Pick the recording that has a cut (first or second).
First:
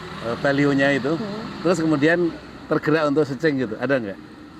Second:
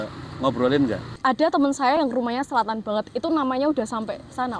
second